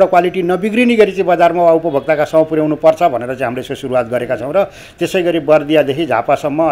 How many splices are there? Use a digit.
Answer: 0